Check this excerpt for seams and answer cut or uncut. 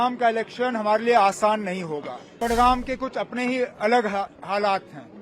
cut